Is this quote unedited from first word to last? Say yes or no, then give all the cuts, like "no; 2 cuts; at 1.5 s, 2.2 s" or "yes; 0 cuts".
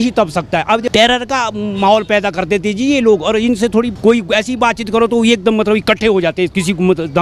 no; 2 cuts; at 0.9 s, 3.9 s